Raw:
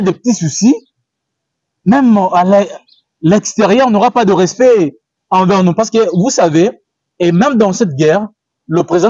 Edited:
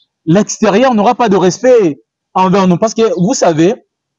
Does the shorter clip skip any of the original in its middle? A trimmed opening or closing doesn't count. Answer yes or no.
no